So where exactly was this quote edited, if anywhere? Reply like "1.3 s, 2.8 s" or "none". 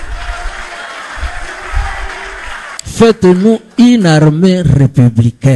2.7 s